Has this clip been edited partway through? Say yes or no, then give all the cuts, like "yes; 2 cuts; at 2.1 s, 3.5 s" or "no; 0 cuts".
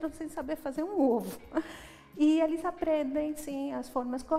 no; 0 cuts